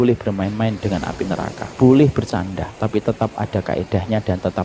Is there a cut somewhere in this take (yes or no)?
yes